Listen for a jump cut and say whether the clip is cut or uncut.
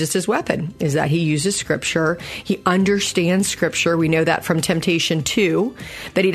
uncut